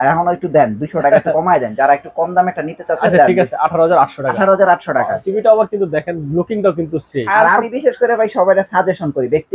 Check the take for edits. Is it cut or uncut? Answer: cut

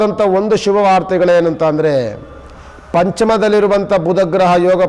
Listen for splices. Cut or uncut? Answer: uncut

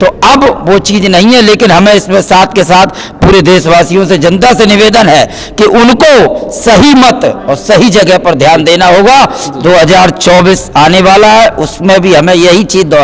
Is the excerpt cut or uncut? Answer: uncut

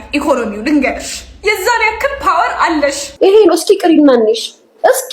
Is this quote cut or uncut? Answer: cut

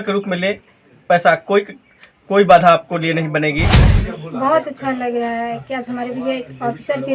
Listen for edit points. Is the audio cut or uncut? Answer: cut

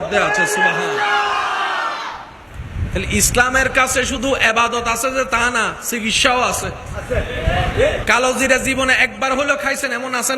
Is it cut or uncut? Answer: cut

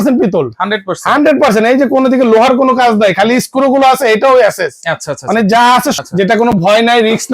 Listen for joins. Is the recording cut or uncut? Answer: cut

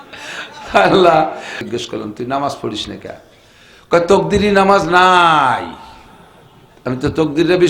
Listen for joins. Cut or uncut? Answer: cut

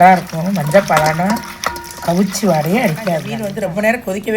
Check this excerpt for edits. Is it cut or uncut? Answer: cut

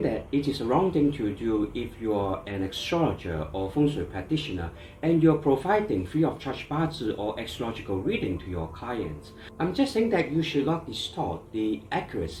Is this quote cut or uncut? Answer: uncut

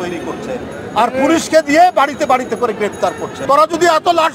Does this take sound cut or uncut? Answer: cut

